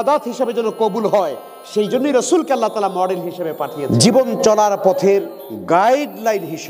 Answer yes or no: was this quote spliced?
yes